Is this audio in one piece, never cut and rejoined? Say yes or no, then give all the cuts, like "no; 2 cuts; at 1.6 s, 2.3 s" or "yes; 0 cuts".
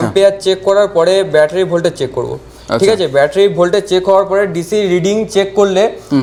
yes; 0 cuts